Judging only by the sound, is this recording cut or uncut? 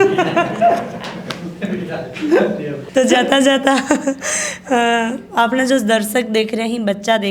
uncut